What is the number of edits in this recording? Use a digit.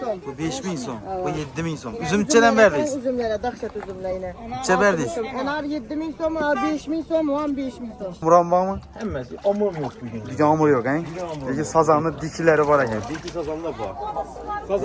1